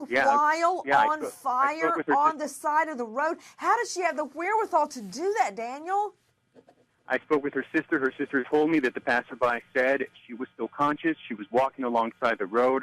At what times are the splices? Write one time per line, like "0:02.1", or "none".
none